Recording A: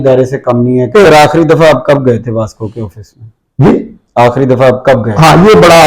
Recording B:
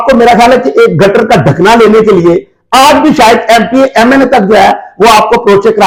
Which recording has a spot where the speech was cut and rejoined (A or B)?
A